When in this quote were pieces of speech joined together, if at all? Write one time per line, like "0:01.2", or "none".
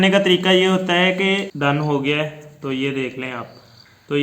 0:01.5